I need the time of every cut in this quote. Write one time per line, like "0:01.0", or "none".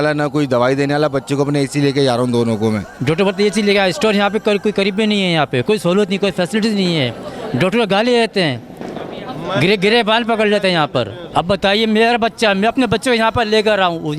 none